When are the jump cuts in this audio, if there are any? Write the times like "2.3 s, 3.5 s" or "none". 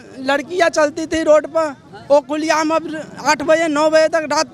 none